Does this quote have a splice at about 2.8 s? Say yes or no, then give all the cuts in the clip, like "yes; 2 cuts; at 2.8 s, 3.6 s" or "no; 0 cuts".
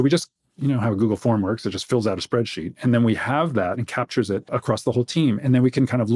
no; 1 cut; at 4.5 s